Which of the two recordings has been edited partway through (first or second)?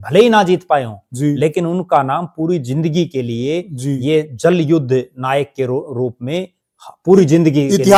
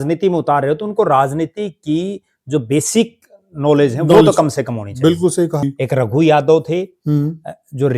second